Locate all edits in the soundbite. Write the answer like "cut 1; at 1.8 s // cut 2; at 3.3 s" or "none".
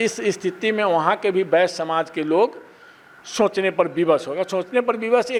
none